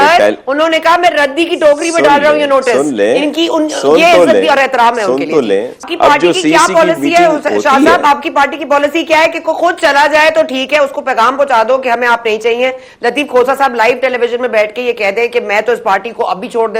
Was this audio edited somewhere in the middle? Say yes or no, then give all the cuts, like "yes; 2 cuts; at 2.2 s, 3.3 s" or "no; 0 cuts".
yes; 1 cut; at 5.9 s